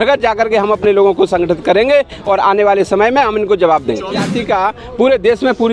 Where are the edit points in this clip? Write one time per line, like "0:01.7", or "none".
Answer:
0:04.3